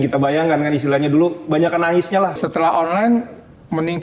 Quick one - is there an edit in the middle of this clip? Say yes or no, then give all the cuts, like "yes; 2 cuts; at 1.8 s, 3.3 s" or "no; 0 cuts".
yes; 1 cut; at 2.4 s